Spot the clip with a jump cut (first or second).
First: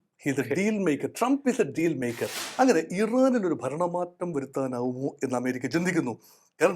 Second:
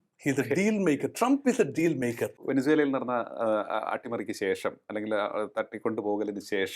first